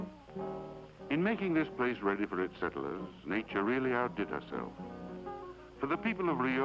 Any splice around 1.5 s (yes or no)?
no